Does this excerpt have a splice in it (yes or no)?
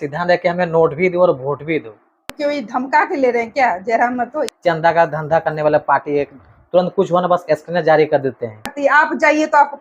yes